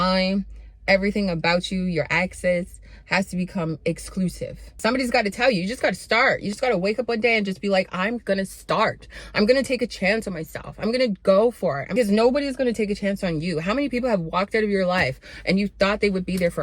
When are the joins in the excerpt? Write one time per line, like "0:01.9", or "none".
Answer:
0:04.5
0:06.6
0:11.9